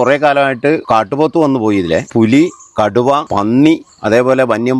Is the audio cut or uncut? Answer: cut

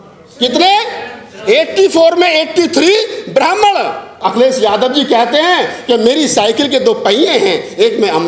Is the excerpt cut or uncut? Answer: cut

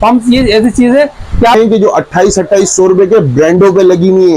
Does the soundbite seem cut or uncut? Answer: cut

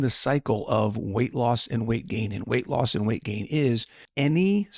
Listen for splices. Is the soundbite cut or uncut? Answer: uncut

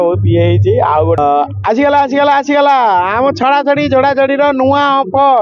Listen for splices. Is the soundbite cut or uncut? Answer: cut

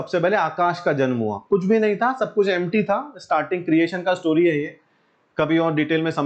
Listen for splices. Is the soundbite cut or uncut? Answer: uncut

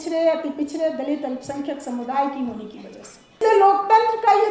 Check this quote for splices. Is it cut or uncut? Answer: cut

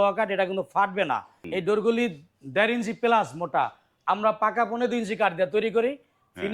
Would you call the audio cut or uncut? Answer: cut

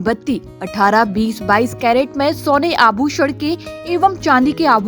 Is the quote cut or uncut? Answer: uncut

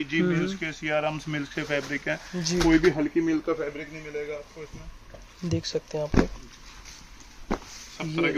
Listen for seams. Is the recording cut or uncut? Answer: uncut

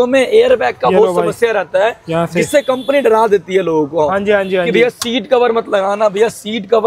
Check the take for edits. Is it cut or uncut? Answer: uncut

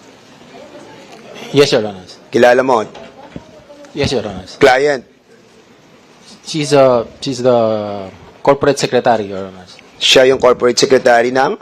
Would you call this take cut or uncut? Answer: uncut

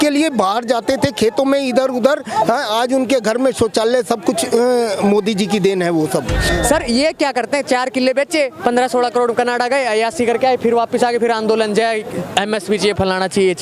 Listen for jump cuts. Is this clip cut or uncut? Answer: cut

